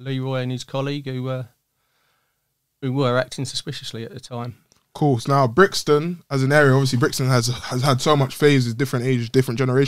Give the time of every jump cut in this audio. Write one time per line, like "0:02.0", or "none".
none